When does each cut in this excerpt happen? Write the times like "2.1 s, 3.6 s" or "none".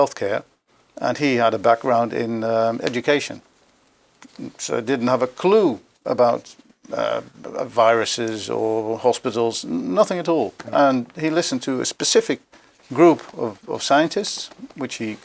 none